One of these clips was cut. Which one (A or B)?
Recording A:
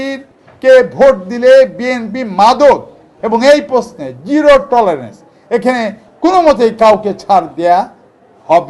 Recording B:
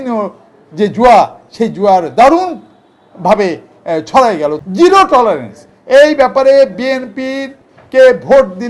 B